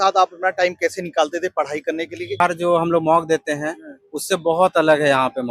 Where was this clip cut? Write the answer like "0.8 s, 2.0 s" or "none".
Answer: 2.4 s